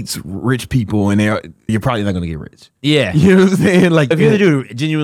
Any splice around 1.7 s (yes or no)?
yes